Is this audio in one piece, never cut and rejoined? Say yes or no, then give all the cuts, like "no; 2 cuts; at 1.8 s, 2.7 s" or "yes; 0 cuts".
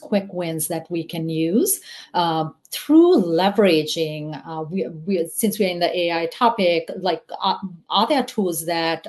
yes; 0 cuts